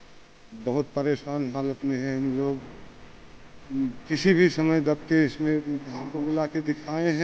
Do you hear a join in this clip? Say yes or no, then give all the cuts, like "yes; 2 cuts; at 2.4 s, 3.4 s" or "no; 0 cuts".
yes; 1 cut; at 6.1 s